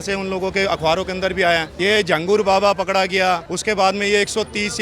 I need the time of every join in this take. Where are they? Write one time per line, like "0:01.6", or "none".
0:01.7
0:03.5